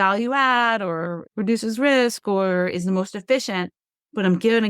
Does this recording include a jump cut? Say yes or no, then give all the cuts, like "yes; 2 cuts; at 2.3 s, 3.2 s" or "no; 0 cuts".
yes; 1 cut; at 1.2 s